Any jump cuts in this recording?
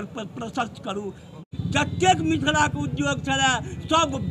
yes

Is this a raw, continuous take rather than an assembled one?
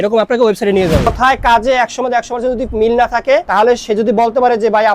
no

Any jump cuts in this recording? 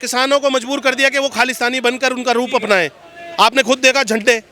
no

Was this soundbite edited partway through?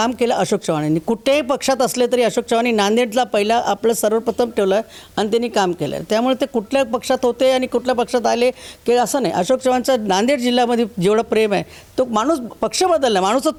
no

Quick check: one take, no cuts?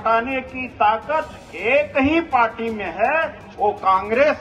yes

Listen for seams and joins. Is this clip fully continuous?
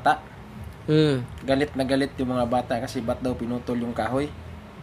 yes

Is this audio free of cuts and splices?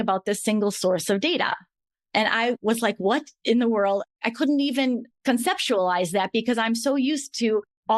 yes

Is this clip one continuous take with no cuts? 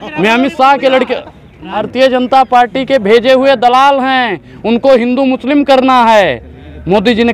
no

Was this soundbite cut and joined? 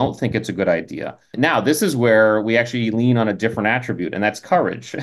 yes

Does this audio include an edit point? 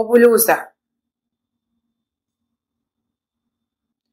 no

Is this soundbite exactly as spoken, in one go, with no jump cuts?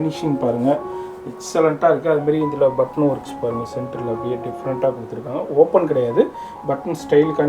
yes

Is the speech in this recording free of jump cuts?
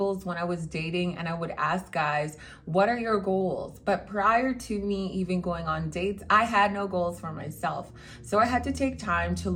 yes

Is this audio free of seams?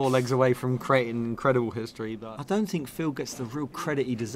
no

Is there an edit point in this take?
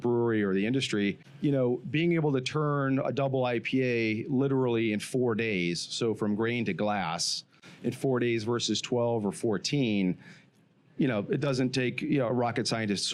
no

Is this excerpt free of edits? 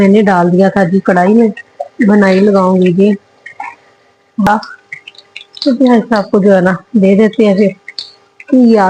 no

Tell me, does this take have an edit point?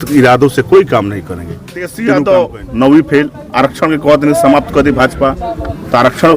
yes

